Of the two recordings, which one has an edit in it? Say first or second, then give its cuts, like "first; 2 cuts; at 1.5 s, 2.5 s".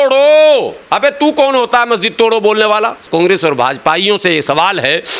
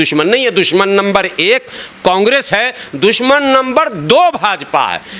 first; 1 cut; at 3.0 s